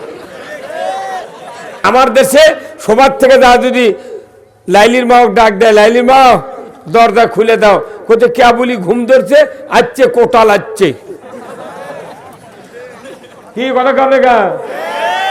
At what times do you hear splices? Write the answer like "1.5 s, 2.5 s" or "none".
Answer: 1.8 s